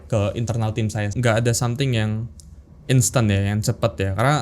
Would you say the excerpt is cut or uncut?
cut